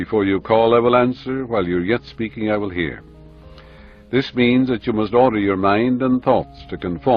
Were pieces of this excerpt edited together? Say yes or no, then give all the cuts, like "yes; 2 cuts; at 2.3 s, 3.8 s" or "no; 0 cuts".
no; 0 cuts